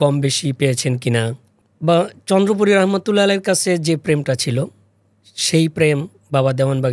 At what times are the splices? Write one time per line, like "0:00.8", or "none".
0:01.5